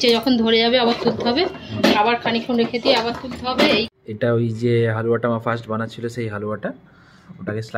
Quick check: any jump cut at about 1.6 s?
no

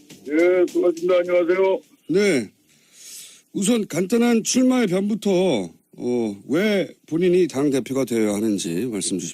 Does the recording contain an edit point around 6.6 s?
no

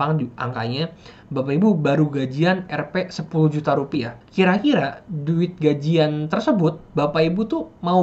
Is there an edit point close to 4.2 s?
yes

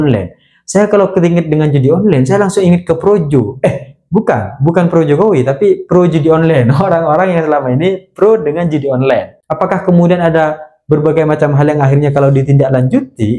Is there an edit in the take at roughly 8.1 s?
no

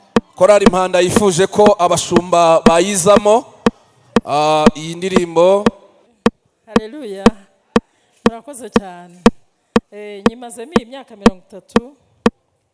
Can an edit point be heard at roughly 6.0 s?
yes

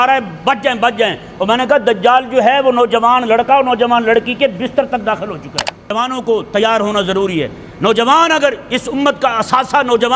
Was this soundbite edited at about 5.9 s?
yes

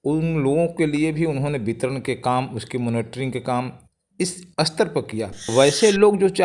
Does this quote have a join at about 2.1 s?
no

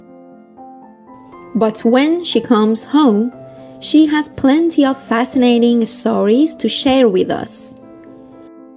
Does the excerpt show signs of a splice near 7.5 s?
yes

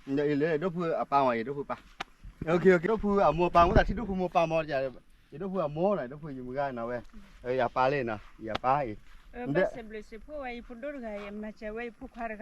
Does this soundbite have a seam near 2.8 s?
yes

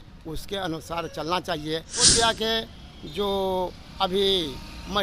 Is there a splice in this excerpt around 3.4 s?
no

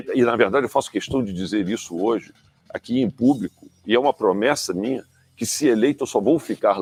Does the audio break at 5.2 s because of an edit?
no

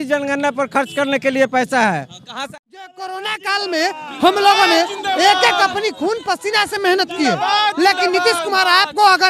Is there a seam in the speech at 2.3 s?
yes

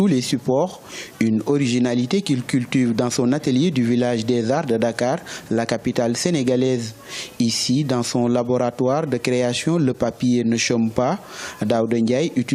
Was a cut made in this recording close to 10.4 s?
no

